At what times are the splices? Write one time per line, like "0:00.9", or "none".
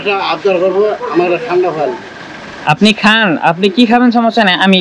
none